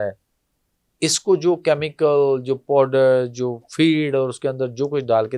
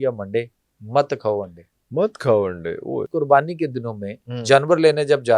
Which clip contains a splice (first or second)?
second